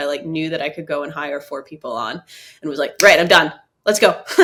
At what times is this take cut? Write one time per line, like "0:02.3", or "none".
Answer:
none